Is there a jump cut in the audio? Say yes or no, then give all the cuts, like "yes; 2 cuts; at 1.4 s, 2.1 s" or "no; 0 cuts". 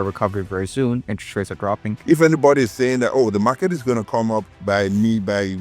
yes; 2 cuts; at 1.9 s, 4.5 s